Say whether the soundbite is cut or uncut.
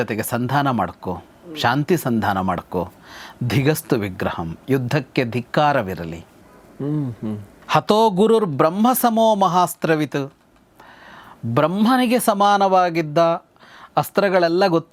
uncut